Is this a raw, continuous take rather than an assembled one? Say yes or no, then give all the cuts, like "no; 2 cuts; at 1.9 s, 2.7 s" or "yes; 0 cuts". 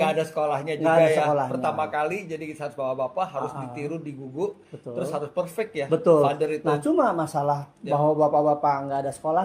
yes; 0 cuts